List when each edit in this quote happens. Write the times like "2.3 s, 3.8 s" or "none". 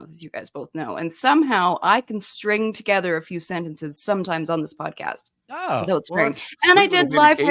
none